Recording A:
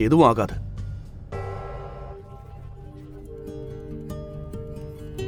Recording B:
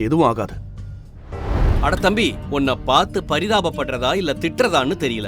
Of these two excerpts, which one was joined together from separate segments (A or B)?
B